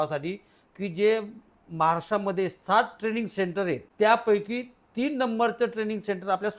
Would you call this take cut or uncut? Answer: cut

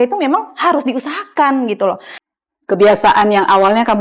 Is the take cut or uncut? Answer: cut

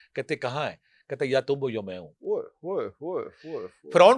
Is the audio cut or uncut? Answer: uncut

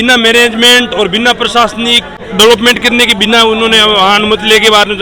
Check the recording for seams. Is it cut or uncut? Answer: cut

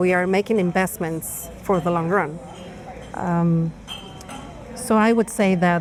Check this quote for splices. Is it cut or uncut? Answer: uncut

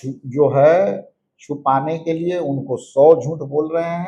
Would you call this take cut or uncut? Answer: uncut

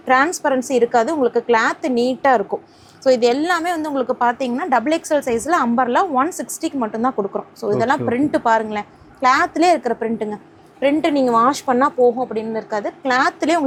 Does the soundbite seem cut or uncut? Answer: uncut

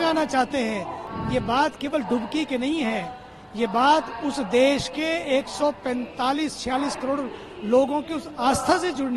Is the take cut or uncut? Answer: cut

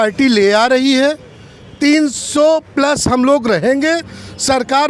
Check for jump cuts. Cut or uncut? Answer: uncut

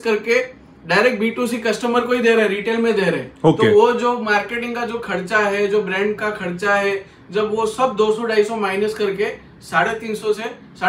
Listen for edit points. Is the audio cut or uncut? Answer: uncut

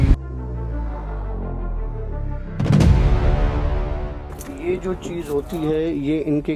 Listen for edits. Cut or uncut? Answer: uncut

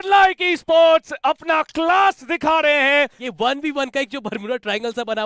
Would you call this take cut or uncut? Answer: cut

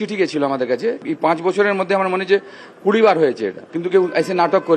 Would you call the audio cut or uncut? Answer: cut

